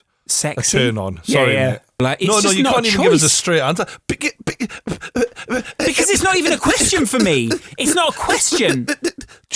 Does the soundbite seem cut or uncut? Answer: cut